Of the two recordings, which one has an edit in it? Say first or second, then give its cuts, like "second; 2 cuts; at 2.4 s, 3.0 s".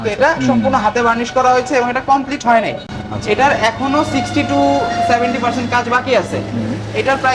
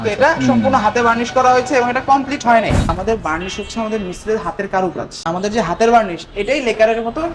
second; 2 cuts; at 2.9 s, 5.1 s